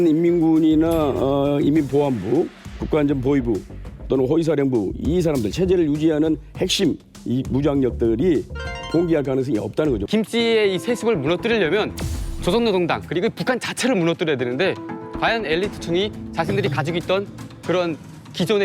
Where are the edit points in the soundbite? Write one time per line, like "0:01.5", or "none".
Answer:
0:10.0

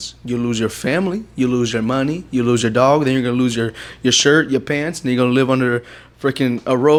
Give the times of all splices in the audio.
none

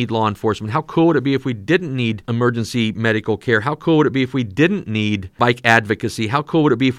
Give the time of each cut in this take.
0:02.2
0:05.3

